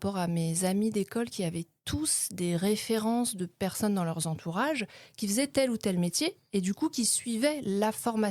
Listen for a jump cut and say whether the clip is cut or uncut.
uncut